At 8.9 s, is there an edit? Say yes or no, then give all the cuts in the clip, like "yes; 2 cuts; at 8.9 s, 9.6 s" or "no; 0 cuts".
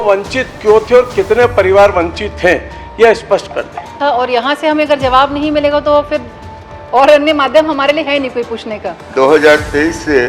yes; 2 cuts; at 3.9 s, 8.9 s